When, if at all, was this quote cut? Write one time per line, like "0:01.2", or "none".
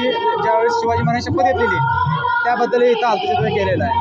none